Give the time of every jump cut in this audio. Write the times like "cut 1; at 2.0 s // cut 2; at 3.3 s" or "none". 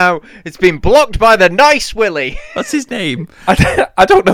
cut 1; at 2.4 s // cut 2; at 3.3 s